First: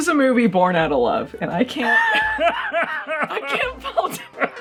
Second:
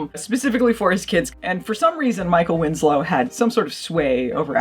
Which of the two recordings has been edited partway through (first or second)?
second